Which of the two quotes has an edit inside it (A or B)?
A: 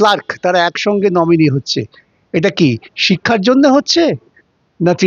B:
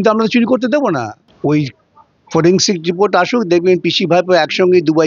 B